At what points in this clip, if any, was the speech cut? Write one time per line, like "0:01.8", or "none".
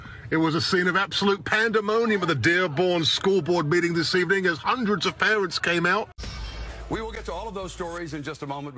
0:06.2